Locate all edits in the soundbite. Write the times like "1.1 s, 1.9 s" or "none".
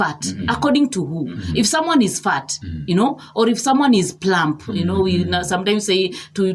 none